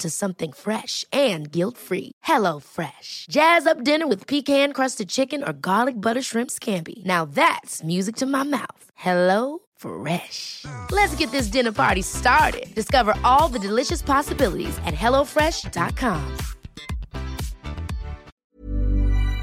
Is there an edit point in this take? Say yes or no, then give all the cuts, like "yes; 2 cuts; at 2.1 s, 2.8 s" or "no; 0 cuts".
yes; 1 cut; at 18.3 s